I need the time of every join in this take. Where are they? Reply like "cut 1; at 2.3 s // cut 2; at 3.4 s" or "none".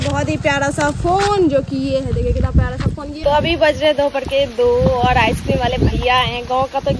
cut 1; at 3.2 s